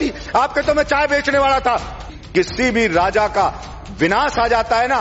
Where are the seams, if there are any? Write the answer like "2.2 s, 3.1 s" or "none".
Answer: 2.1 s